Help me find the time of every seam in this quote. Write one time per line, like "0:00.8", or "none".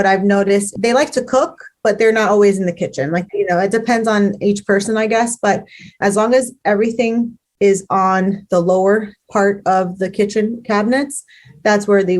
0:03.2